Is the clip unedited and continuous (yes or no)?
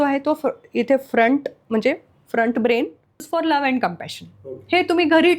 no